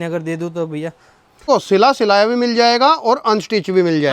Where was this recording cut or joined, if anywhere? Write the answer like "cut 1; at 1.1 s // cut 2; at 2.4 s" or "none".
cut 1; at 1.5 s